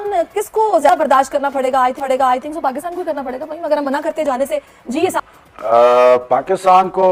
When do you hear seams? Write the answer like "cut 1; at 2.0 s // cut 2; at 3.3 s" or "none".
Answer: none